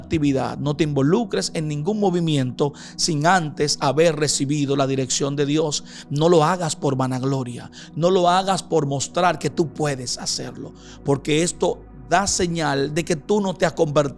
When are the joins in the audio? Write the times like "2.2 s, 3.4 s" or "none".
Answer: none